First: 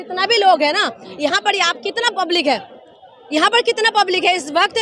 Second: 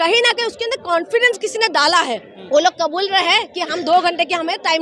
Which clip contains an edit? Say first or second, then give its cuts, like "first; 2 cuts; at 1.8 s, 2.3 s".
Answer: second; 1 cut; at 2.3 s